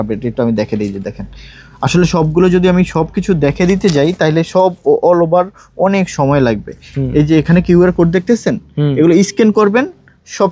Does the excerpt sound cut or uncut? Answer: uncut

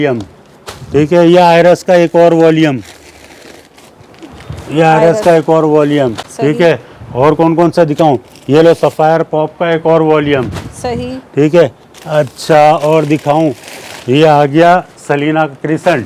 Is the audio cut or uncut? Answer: uncut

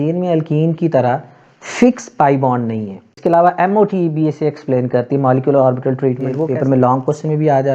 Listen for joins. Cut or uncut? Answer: cut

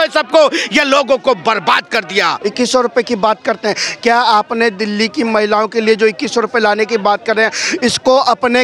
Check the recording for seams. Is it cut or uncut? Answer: cut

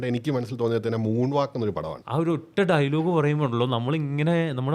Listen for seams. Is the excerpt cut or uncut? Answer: cut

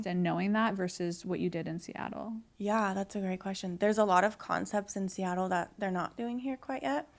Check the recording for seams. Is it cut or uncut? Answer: uncut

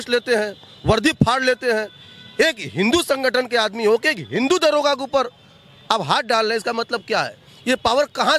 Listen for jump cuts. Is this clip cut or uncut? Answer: uncut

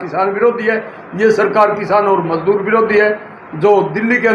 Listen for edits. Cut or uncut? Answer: uncut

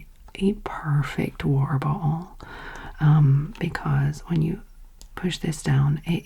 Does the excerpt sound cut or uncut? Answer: uncut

